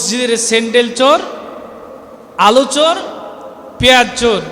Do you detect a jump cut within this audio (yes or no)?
no